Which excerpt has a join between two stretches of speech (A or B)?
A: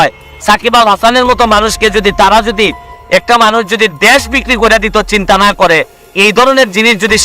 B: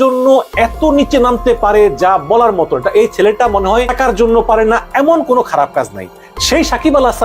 B